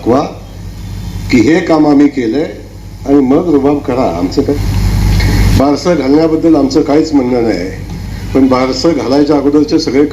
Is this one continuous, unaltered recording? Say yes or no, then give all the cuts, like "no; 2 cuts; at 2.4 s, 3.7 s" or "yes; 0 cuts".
no; 1 cut; at 4.5 s